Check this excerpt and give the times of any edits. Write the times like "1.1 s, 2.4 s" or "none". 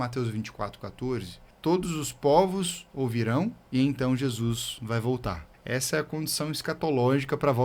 1.4 s, 3.6 s, 5.5 s